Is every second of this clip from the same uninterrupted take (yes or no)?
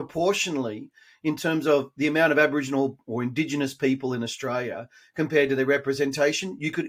yes